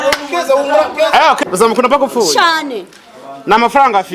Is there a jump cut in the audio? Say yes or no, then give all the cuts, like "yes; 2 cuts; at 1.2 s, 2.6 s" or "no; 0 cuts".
yes; 1 cut; at 1.4 s